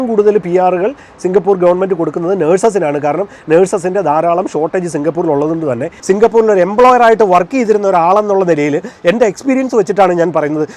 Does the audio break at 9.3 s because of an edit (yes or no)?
no